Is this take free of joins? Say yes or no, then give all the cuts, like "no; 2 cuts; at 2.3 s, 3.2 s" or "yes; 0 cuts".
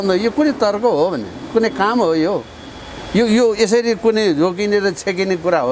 yes; 0 cuts